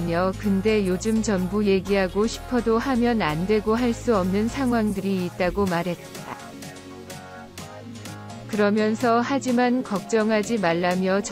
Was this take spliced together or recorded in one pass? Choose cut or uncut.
uncut